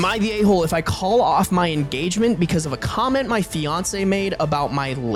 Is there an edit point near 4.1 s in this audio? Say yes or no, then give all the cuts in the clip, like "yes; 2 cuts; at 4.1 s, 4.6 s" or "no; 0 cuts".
no; 0 cuts